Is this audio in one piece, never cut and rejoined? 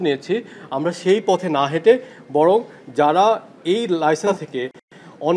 yes; 0 cuts

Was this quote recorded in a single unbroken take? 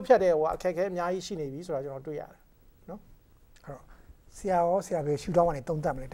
yes; 0 cuts

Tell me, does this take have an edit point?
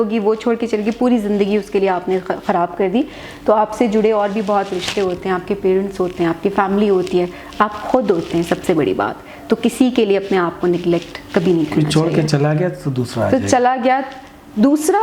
no; 0 cuts

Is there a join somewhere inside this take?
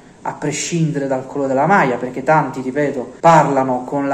yes; 1 cut; at 3.1 s

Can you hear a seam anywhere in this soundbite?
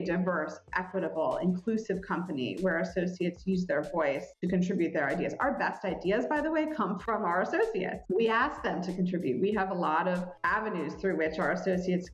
yes; 1 cut; at 7.0 s

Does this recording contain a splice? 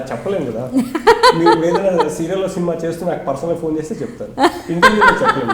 no; 0 cuts

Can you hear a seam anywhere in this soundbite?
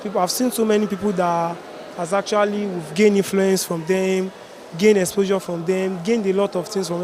no; 0 cuts

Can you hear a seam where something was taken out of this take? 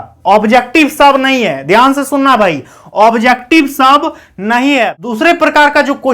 yes; 1 cut; at 5.0 s

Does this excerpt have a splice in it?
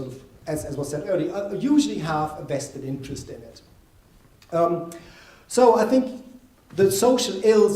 yes; 1 cut; at 3.5 s

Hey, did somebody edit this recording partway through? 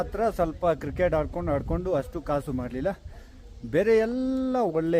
no; 0 cuts

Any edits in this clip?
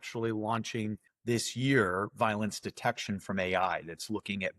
yes; 1 cut; at 1.1 s

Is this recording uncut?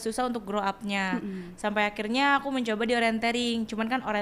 yes; 0 cuts

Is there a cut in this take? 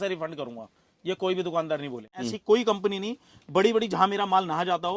yes; 1 cut; at 2.2 s

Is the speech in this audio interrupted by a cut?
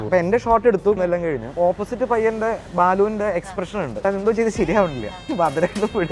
yes; 3 cuts; at 1.0 s, 4.0 s, 5.2 s

